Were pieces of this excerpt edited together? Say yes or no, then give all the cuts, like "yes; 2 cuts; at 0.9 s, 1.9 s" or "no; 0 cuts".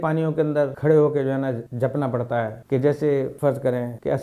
yes; 2 cuts; at 1.7 s, 3.3 s